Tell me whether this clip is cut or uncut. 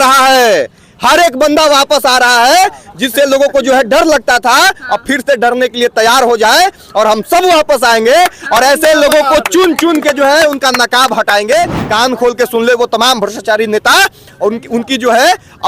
cut